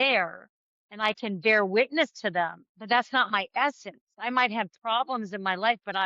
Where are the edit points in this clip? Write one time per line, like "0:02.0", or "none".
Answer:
0:02.7